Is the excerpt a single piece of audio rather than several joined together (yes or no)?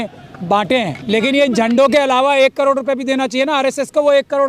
no